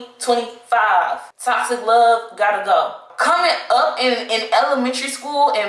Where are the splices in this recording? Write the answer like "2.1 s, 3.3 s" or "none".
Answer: 3.1 s